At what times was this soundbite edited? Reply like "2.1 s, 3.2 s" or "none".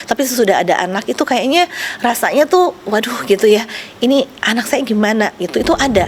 none